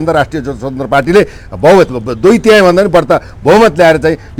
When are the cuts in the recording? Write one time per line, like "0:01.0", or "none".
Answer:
none